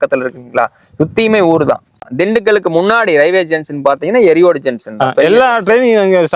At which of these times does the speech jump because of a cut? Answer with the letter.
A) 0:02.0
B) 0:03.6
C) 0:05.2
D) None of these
A